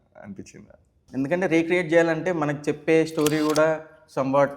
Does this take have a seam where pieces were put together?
yes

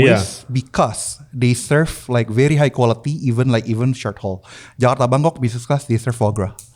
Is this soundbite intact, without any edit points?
yes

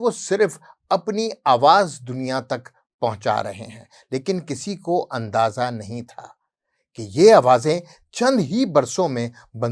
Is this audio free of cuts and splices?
yes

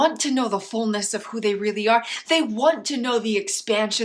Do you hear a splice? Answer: no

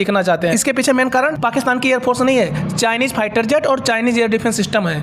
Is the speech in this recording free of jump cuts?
yes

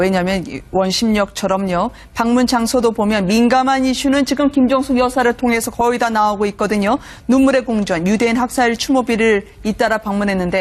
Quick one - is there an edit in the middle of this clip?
no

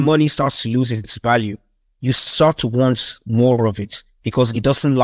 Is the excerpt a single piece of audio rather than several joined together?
yes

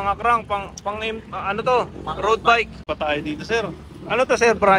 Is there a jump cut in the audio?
yes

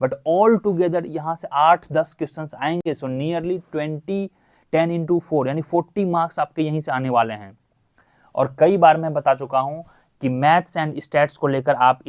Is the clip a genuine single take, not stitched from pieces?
yes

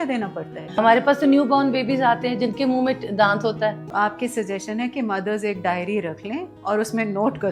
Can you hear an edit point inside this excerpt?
yes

